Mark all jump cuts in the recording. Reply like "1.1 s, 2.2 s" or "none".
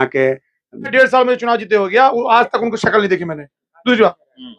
0.9 s